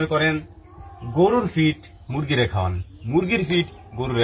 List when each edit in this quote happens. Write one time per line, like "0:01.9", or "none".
none